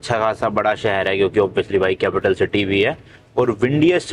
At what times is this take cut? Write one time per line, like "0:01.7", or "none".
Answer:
none

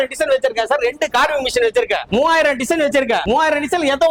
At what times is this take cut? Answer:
0:02.0
0:03.2

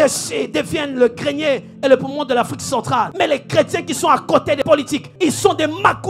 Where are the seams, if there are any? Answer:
0:03.1
0:04.7

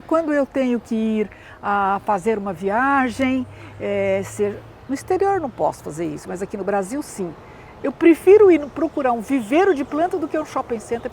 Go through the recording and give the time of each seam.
none

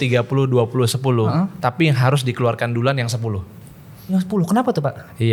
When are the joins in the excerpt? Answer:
none

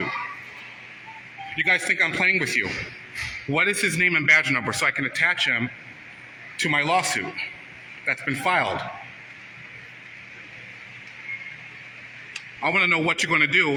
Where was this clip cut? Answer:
none

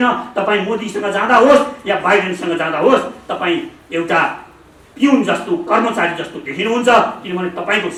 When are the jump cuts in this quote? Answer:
none

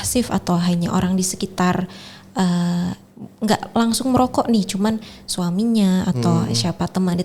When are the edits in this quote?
none

